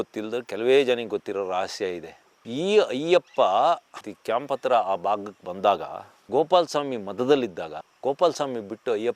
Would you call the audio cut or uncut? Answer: uncut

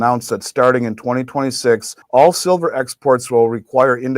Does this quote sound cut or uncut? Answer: cut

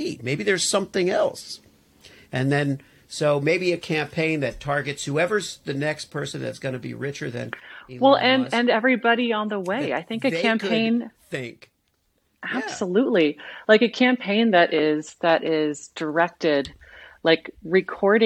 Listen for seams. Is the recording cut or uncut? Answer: uncut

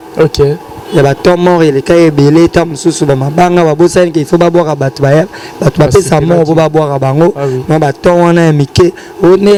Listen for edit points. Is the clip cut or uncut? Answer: uncut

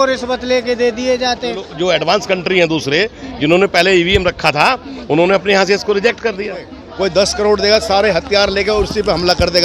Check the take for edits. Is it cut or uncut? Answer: cut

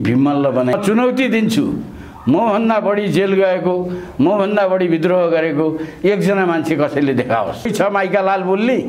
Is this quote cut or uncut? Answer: cut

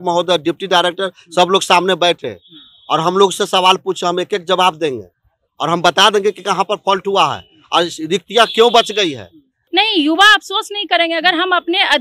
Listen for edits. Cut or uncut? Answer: cut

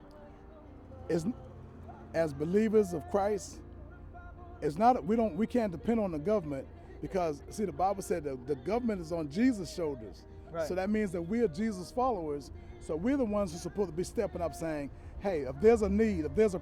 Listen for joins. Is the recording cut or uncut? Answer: uncut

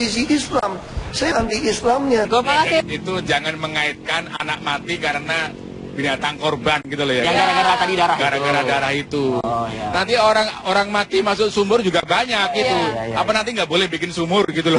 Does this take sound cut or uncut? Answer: cut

